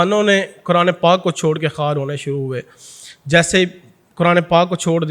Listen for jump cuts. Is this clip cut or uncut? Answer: uncut